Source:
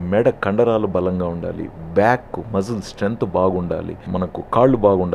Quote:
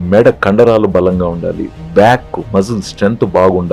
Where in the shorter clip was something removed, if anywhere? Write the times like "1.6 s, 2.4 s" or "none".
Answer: none